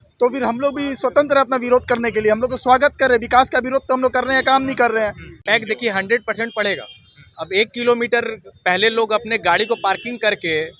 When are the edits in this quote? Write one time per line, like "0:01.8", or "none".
0:05.3

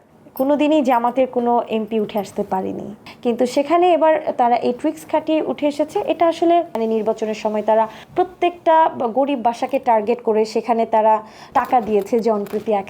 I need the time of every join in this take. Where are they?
0:06.8
0:11.4

